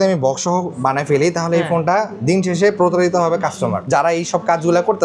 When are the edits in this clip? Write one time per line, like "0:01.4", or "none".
0:03.8